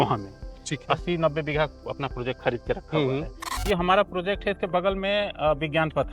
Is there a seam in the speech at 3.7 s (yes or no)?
yes